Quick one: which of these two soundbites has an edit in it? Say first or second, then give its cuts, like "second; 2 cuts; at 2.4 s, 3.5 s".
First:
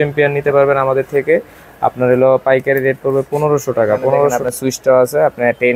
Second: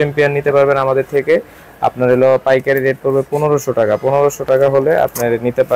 first; 1 cut; at 4.4 s